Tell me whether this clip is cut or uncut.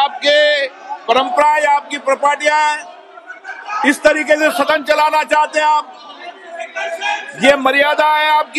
uncut